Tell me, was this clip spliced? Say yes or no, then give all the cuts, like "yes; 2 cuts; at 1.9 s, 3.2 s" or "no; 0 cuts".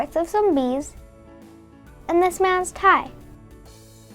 yes; 1 cut; at 3.1 s